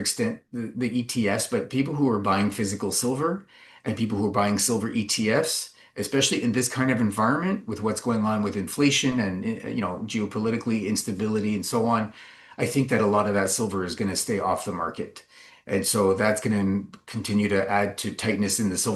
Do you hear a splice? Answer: no; 0 cuts

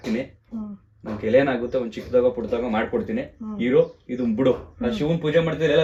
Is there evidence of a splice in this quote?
no; 0 cuts

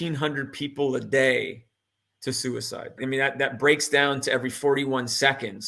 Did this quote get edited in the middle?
no; 0 cuts

